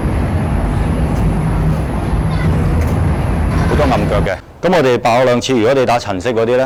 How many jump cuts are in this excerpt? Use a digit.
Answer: 0